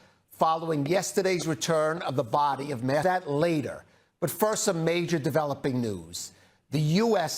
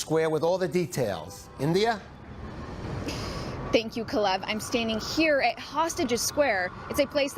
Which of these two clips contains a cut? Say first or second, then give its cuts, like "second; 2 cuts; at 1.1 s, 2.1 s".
first; 1 cut; at 3.0 s